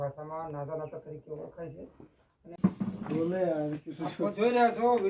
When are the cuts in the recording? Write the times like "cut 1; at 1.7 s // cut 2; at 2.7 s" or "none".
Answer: cut 1; at 2.6 s